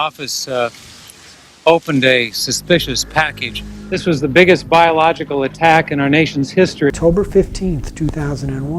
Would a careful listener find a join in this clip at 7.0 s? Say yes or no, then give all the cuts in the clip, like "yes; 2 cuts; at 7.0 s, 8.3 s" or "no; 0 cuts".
yes; 1 cut; at 7.0 s